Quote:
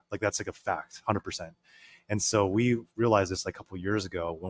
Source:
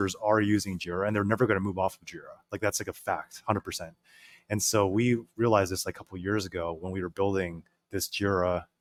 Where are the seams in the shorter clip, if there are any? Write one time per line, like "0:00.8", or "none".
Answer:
none